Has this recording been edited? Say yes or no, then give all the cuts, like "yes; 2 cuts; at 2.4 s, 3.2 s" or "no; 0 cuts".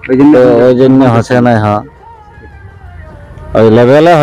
no; 0 cuts